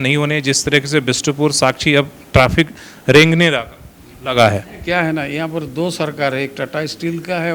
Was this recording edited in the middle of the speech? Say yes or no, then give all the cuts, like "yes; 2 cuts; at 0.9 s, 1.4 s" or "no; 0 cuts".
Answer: no; 0 cuts